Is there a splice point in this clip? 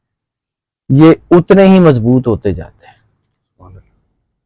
no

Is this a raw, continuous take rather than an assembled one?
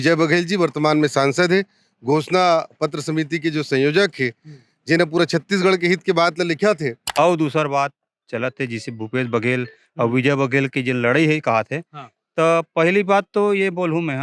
no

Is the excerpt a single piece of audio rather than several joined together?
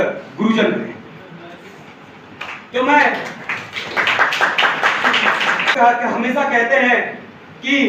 no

